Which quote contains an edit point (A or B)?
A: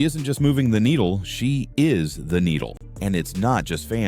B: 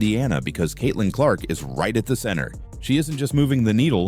A